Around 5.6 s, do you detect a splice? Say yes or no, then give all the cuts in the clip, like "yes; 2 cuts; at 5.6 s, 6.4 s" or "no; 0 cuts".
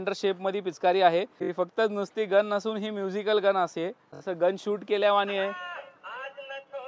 no; 2 cuts; at 1.4 s, 4.1 s